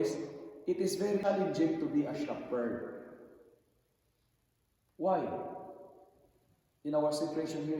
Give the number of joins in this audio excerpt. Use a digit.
1